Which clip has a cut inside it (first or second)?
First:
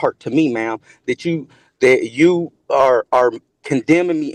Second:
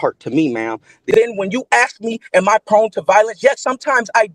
second